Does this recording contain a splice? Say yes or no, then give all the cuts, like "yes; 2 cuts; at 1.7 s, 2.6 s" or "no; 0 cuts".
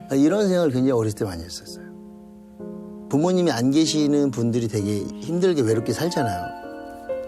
yes; 1 cut; at 2.9 s